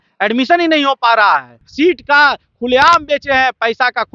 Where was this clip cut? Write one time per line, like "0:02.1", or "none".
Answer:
0:01.6

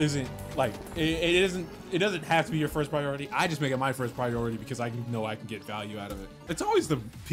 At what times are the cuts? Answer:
0:06.3

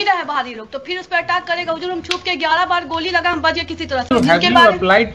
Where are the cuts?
0:04.1

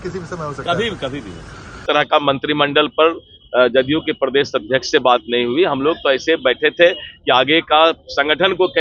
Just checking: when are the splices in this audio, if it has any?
0:01.8

